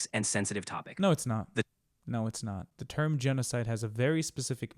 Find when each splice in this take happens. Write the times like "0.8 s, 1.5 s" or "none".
2.7 s